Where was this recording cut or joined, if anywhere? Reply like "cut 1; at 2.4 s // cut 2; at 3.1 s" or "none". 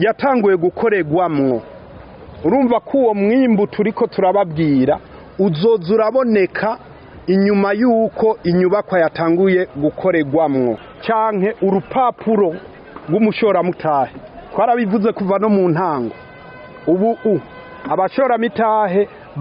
cut 1; at 10.9 s